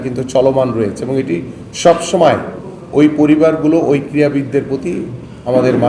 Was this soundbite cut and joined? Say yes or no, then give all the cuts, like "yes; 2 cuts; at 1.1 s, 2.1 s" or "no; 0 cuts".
no; 0 cuts